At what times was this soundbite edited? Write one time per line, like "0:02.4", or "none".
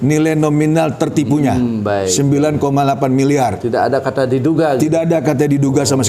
none